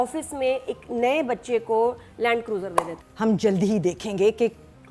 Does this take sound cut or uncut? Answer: cut